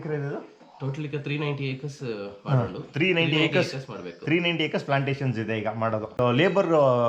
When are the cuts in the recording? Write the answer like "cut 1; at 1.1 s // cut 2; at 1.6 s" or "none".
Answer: cut 1; at 6.2 s

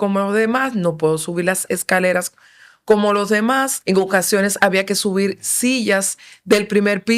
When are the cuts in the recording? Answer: cut 1; at 3.7 s

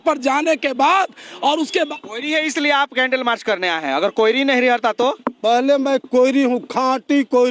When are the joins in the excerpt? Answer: cut 1; at 1.7 s

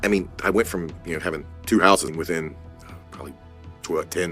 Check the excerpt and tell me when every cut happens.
cut 1; at 2.1 s

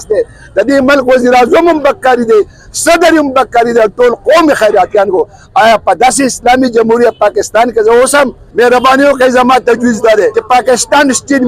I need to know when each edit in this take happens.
cut 1; at 8.4 s // cut 2; at 10.4 s

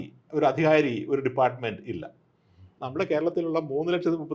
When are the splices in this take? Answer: cut 1; at 2.7 s

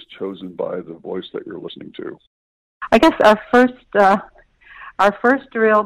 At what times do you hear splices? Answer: cut 1; at 2.7 s

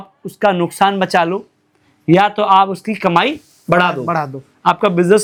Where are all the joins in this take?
none

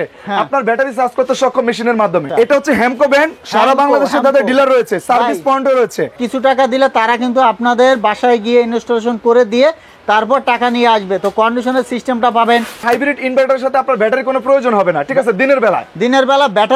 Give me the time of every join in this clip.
cut 1; at 2.3 s // cut 2; at 6.2 s // cut 3; at 12.8 s

